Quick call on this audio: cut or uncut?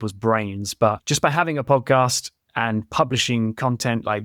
cut